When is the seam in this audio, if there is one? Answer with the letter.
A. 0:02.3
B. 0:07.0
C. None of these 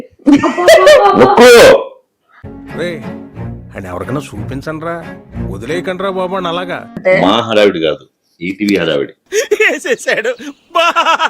B